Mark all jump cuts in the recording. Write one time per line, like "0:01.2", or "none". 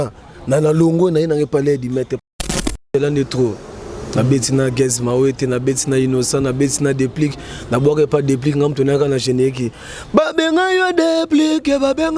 0:02.4